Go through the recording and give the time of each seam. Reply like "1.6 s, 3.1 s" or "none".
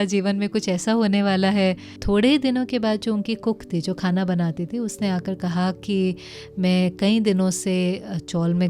1.9 s